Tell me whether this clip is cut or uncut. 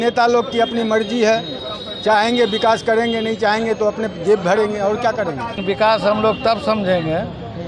cut